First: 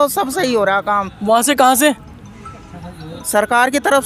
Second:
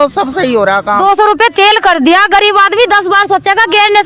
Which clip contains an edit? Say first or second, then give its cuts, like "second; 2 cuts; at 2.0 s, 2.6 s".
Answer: second; 1 cut; at 1.0 s